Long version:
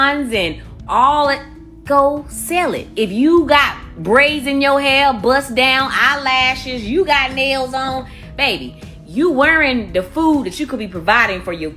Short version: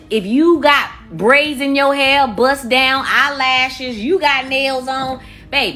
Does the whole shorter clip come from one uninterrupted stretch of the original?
yes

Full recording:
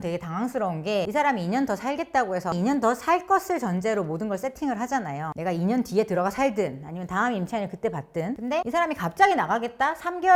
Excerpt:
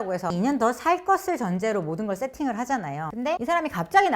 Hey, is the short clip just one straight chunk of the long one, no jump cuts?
no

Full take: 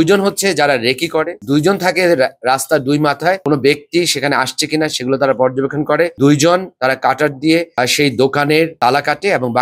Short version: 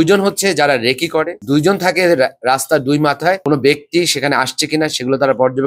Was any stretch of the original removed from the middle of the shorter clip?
no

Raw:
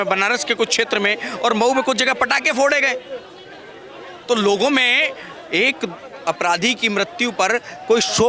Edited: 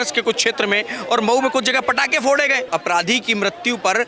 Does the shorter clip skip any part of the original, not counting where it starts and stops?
yes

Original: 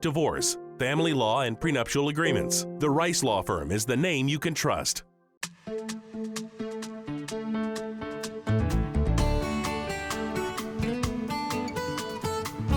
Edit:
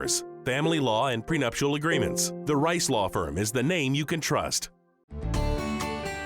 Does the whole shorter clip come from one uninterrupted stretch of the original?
no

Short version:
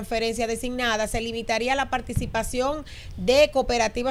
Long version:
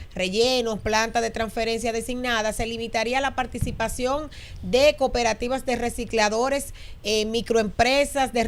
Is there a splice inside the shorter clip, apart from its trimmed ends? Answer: no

